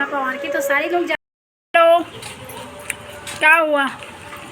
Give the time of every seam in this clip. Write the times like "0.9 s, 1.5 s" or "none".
1.2 s